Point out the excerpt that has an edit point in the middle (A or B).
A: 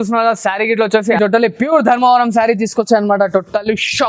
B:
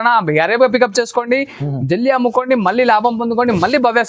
A